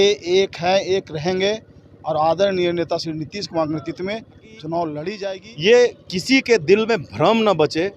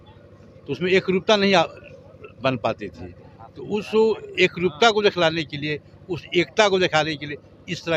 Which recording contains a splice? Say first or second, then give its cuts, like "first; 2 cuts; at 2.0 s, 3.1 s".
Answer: first; 1 cut; at 5.2 s